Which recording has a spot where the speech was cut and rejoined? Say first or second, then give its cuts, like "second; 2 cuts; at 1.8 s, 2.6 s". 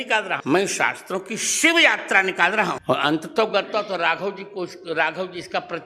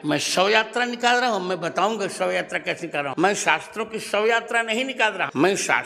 first; 1 cut; at 2.8 s